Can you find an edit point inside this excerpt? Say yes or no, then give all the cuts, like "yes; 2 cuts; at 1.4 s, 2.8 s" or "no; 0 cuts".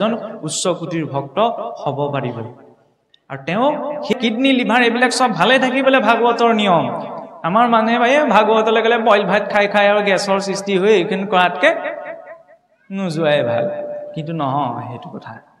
yes; 1 cut; at 4.1 s